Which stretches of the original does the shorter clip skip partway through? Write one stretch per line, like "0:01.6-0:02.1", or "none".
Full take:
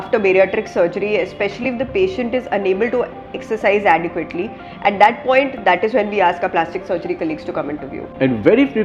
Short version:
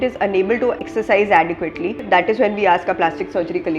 0:03.2-0:03.4
0:04.5-0:05.5